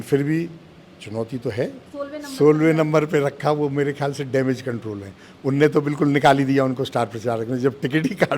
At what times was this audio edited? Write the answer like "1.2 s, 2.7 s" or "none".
1.8 s